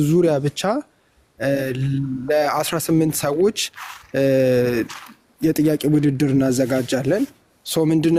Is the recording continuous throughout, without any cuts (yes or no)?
yes